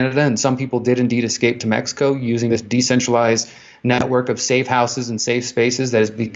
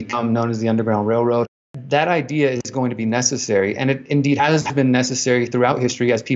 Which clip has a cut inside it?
second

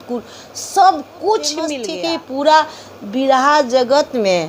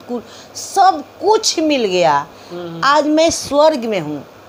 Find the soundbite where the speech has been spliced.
first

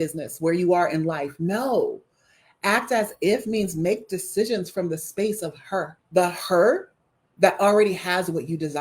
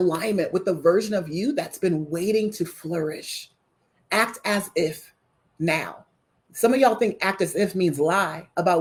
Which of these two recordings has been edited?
first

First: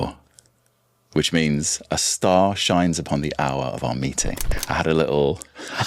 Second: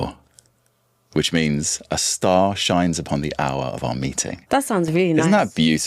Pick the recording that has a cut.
first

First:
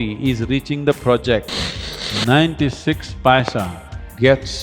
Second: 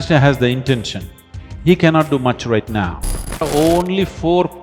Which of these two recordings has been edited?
second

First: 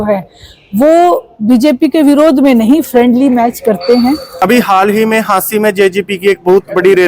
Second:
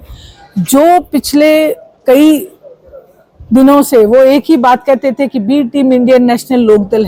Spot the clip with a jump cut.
first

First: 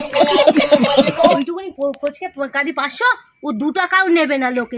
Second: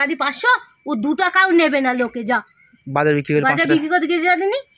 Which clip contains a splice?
first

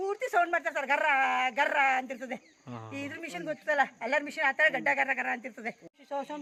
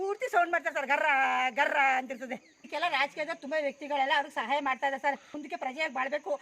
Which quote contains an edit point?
second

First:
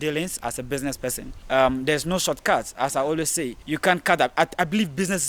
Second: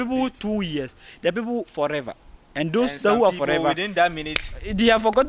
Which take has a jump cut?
first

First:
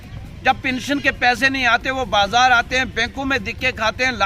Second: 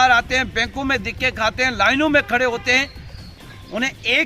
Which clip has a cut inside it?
second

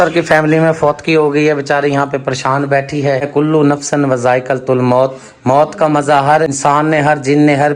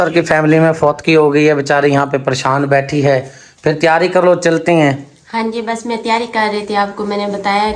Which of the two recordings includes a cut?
first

